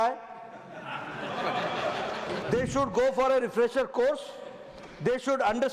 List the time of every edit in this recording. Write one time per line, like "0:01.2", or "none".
0:02.4